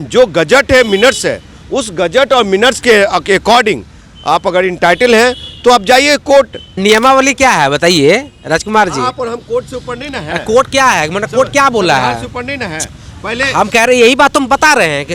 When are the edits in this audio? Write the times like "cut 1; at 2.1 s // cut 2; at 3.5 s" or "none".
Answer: cut 1; at 6.6 s